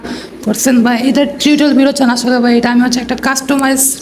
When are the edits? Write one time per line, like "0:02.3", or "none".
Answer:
none